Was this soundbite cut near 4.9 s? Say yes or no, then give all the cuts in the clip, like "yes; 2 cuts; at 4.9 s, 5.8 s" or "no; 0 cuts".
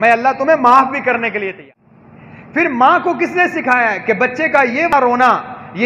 yes; 2 cuts; at 1.6 s, 4.9 s